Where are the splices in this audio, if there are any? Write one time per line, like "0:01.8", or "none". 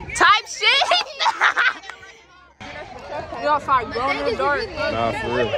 0:02.6

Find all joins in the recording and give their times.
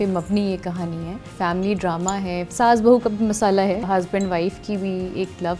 0:01.2
0:02.5
0:03.8

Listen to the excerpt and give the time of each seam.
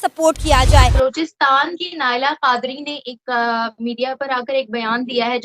0:00.9

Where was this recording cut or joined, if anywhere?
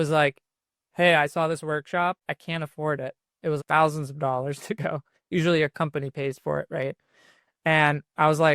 0:02.2
0:03.6

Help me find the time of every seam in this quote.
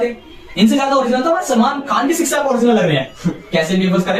none

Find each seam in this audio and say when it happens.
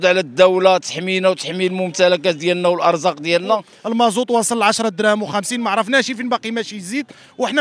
0:03.7

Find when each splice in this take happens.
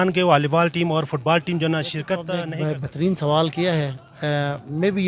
0:02.3

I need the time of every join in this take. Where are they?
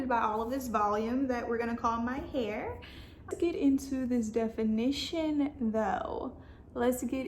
0:03.3

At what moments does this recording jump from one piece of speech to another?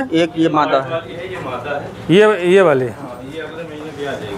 none

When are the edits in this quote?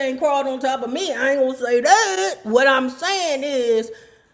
none

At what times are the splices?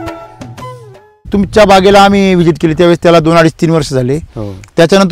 0:01.3

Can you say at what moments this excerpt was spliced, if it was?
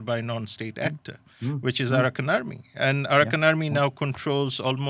none

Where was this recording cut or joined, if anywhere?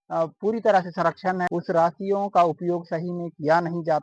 0:01.5

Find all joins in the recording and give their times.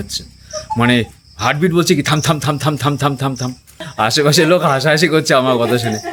0:03.8

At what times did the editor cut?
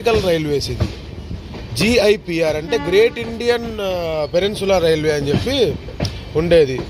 none

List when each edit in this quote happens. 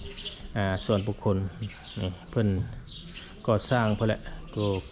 none

